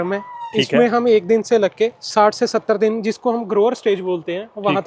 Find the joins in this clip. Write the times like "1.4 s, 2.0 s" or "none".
none